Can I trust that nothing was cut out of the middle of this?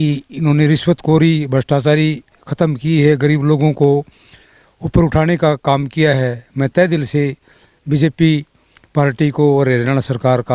yes; 0 cuts

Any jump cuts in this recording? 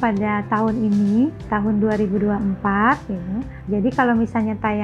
yes; 2 cuts; at 1.5 s, 3.5 s

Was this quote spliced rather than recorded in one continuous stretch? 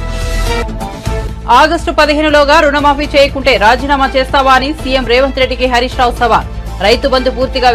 no; 0 cuts

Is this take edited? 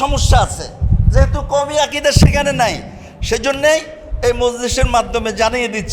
no; 0 cuts

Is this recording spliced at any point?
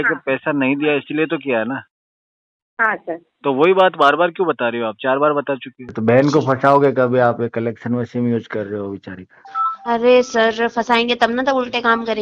yes; 1 cut; at 5.8 s

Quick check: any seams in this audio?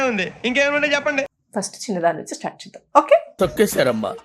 yes; 1 cut; at 1.4 s

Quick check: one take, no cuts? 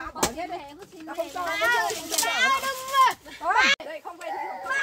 no; 1 cut; at 3.9 s

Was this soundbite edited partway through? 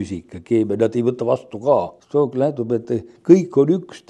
yes; 1 cut; at 2.0 s

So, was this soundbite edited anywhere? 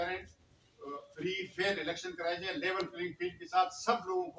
no; 0 cuts

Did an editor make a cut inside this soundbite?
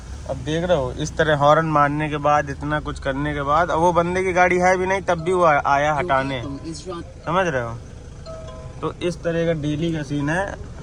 no; 0 cuts

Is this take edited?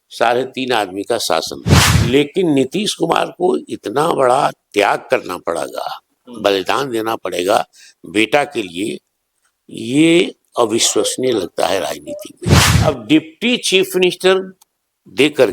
yes; 2 cuts; at 2.0 s, 12.7 s

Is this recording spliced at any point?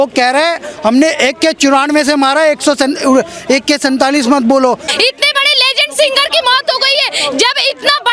yes; 1 cut; at 4.9 s

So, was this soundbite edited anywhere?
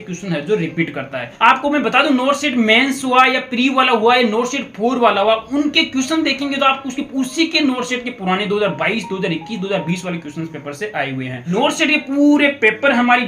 yes; 2 cuts; at 1.3 s, 11.5 s

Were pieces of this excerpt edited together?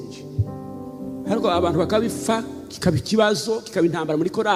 no; 0 cuts

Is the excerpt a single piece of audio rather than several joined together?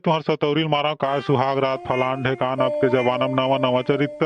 yes; 0 cuts

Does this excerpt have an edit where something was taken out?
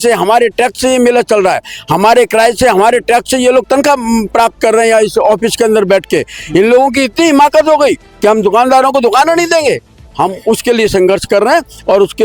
no; 0 cuts

